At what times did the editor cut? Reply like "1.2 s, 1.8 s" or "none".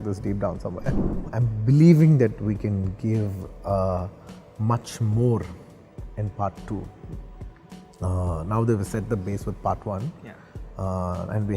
1.0 s